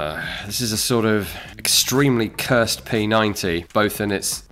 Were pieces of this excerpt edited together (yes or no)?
no